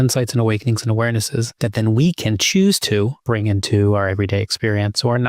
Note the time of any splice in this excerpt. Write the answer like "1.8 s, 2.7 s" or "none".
1.5 s, 3.2 s